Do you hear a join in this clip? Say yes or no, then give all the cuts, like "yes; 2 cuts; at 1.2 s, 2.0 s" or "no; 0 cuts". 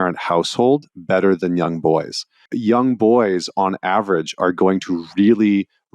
yes; 1 cut; at 2.4 s